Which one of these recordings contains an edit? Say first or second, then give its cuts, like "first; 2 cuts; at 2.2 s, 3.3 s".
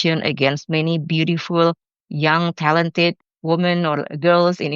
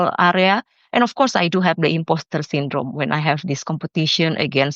first; 1 cut; at 3.2 s